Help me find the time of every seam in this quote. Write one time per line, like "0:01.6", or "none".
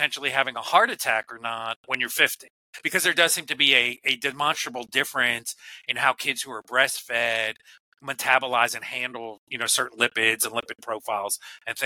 none